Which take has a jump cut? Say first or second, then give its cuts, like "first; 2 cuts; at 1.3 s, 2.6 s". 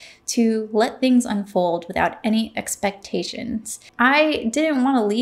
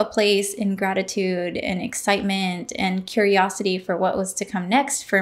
first; 1 cut; at 3.9 s